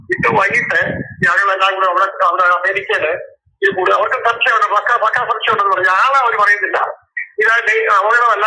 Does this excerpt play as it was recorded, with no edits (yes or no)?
yes